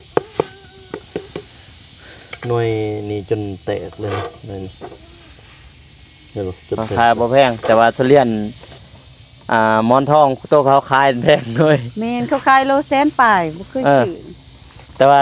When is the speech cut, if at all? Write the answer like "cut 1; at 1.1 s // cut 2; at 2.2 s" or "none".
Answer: cut 1; at 6.9 s

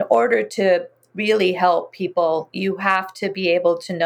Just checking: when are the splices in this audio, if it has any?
none

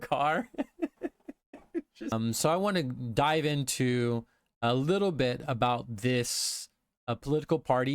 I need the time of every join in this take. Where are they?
cut 1; at 2.1 s

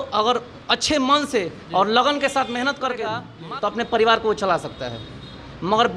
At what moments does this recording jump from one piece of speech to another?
cut 1; at 3.3 s

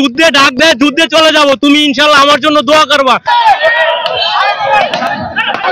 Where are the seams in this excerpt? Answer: cut 1; at 3.3 s

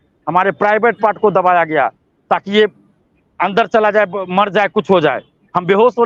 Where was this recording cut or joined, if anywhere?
none

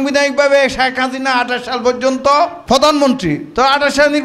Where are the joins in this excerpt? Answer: cut 1; at 2.6 s

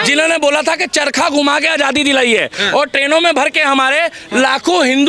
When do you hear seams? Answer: none

